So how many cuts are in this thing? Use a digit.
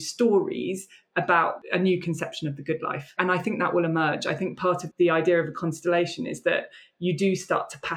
2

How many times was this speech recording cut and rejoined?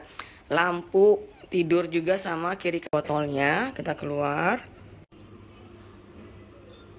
1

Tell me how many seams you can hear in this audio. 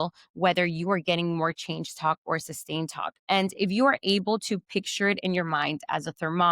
1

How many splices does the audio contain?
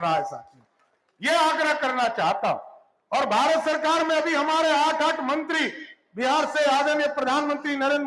0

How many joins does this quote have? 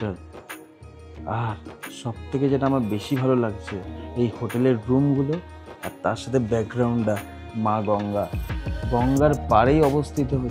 0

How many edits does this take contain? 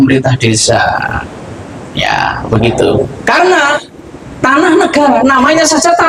0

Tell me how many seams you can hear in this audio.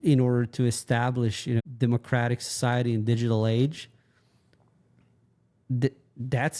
1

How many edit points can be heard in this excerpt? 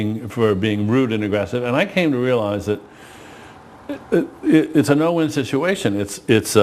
1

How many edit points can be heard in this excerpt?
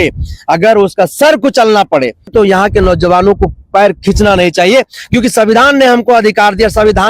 0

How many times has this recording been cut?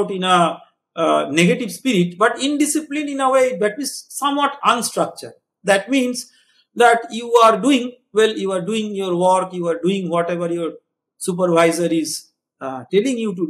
0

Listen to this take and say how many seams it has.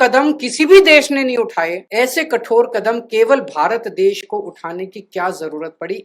1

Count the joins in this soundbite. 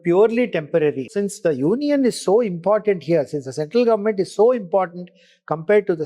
1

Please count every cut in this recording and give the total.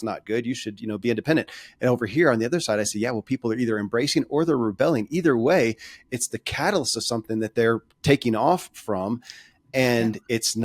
0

